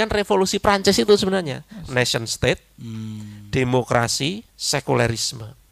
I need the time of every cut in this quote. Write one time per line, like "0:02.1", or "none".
0:04.5